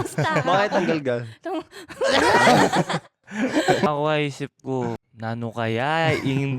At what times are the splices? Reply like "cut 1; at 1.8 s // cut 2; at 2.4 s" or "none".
cut 1; at 3.9 s // cut 2; at 5.1 s